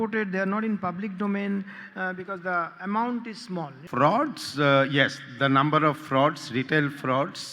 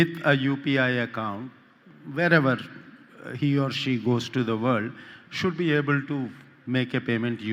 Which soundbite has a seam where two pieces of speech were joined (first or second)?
first